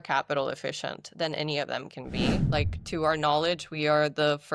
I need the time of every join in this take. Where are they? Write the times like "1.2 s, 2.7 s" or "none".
2.5 s